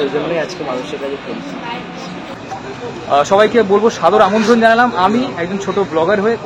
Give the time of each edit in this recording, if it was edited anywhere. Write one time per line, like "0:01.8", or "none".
0:02.3